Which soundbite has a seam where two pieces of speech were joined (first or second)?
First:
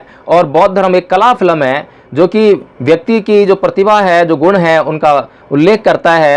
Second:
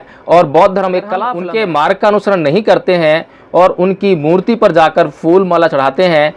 second